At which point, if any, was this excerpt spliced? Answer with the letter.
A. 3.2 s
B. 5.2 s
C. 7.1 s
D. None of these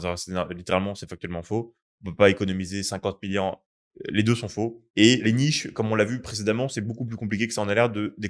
B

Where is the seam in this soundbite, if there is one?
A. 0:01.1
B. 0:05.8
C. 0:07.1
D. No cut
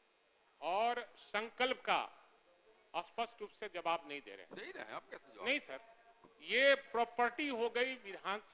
D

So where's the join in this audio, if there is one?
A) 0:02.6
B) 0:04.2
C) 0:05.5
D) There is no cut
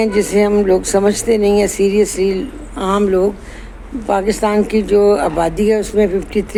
D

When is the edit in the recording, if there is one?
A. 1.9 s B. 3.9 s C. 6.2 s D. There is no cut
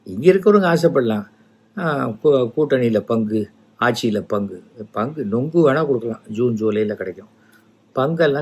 D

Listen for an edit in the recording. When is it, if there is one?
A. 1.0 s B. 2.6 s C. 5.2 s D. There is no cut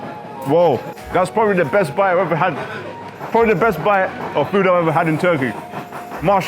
A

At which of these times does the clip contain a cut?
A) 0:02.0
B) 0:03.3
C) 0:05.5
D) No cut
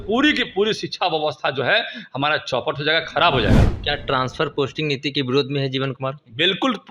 D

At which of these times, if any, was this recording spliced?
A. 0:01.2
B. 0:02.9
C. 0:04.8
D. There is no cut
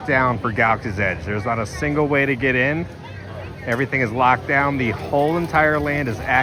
D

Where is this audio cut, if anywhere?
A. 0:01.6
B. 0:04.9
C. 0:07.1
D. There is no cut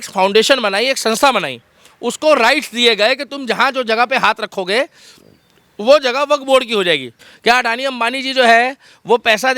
C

